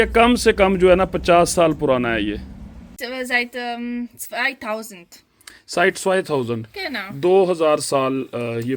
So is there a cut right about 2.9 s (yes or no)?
yes